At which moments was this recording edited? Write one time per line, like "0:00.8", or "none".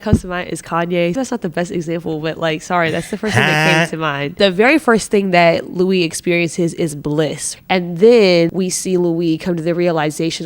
0:01.2
0:04.3
0:07.5
0:08.5